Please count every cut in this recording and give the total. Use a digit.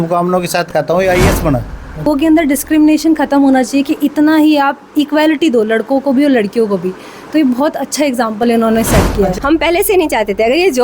2